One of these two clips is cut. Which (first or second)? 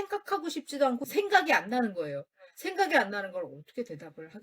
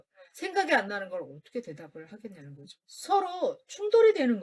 first